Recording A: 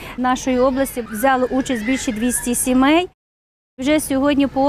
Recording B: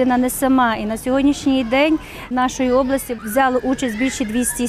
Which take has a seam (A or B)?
A